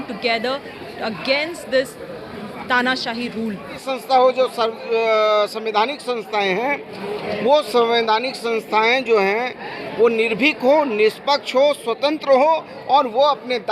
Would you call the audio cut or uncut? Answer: cut